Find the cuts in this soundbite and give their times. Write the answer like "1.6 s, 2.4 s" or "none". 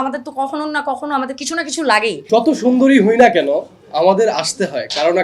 2.2 s